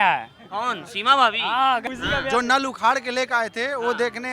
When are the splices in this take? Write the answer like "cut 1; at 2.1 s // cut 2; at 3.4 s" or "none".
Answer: cut 1; at 1.8 s